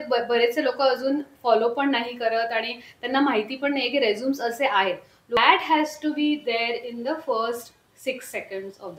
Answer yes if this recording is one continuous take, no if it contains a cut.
no